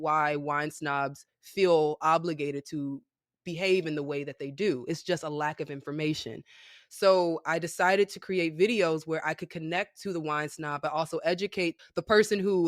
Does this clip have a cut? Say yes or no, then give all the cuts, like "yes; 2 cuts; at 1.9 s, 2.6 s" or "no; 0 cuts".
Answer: yes; 1 cut; at 11.8 s